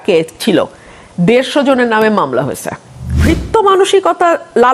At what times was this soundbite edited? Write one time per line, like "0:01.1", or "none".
0:03.2

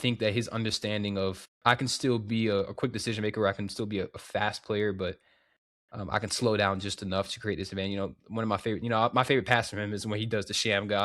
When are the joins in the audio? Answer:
0:01.5

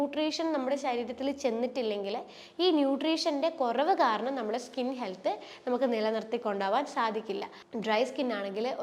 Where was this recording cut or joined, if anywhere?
0:07.6

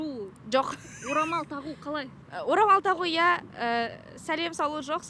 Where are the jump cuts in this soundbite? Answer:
none

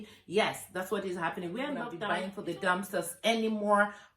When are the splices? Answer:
0:01.9

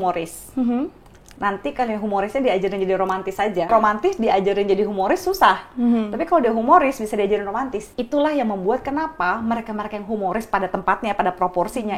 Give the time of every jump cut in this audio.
0:03.7
0:07.8

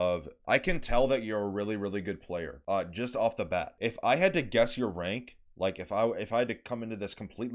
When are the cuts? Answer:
0:02.5
0:03.7

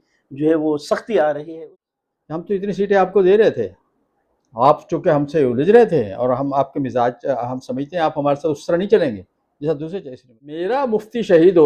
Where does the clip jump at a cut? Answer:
0:01.5
0:10.6

